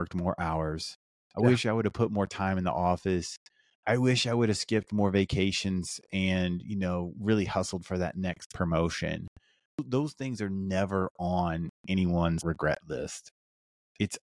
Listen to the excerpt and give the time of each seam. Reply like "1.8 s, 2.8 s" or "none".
9.8 s, 12.4 s